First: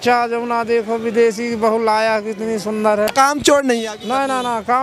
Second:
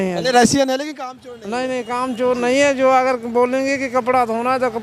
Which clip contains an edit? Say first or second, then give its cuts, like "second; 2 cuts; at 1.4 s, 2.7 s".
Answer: first; 1 cut; at 3.1 s